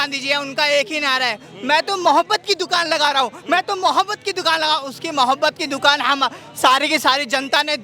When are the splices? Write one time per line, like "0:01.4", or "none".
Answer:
none